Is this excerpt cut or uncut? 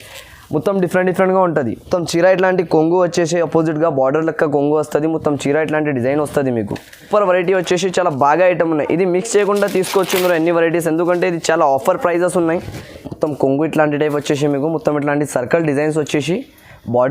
cut